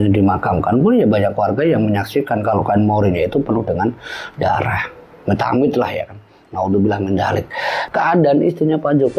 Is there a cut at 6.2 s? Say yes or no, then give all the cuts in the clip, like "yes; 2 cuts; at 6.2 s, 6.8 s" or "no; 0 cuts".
no; 1 cut; at 7.8 s